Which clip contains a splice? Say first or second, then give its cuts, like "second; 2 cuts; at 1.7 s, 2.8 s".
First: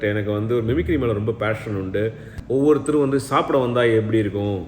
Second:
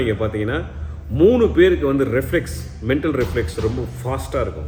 first; 1 cut; at 2.3 s